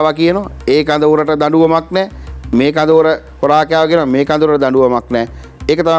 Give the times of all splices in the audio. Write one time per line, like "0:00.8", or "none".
none